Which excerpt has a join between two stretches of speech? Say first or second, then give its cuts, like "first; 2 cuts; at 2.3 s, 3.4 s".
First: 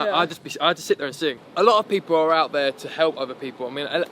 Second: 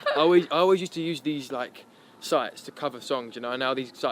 first; 1 cut; at 1.4 s